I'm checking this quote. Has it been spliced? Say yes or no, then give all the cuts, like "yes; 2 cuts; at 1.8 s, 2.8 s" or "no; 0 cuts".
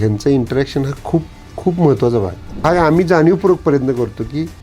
yes; 1 cut; at 2.4 s